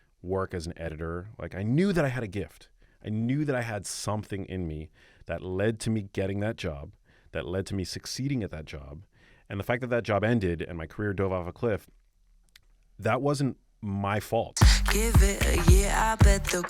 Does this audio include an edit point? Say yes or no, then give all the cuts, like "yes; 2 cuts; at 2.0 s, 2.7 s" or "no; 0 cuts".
yes; 1 cut; at 14.5 s